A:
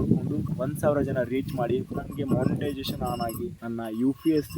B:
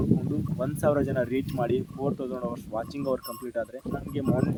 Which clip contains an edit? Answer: A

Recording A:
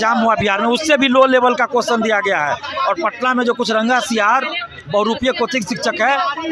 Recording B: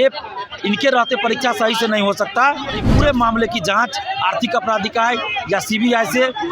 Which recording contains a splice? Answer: B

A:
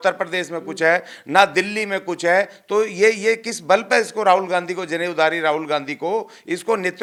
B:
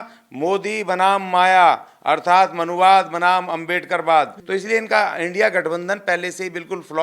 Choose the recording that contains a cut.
B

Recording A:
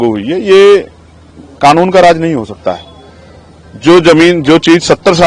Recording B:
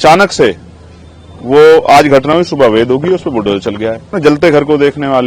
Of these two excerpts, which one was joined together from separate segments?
B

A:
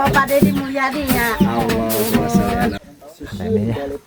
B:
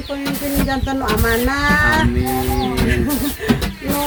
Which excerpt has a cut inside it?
A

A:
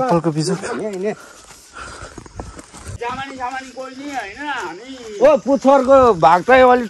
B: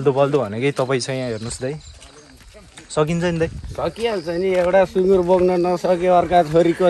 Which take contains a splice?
A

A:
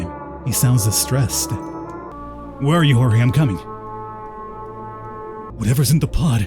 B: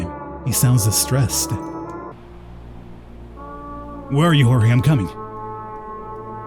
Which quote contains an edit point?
A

